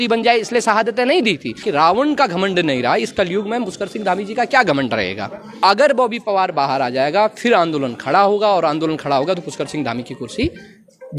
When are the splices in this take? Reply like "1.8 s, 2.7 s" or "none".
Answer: 1.6 s, 5.5 s